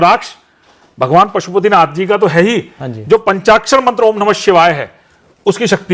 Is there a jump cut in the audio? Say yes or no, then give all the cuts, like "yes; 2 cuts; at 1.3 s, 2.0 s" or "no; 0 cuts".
no; 0 cuts